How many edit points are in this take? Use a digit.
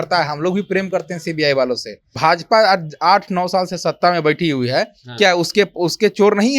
1